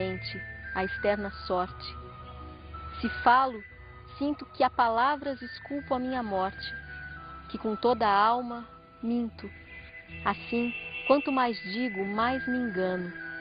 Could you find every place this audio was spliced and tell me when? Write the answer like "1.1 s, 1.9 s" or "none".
none